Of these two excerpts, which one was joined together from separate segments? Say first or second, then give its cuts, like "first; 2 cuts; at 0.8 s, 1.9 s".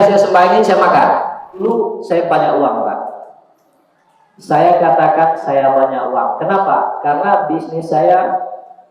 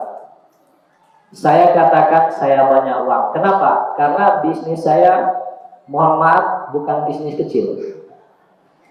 first; 1 cut; at 1.6 s